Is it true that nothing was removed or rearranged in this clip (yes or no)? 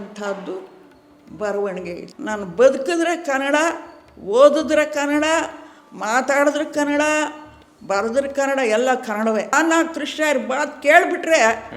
no